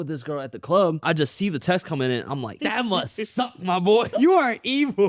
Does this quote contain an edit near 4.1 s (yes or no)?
yes